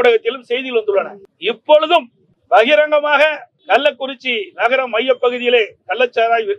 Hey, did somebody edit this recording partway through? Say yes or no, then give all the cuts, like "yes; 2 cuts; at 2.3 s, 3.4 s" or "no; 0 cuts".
no; 0 cuts